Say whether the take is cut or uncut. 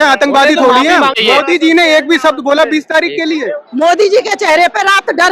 cut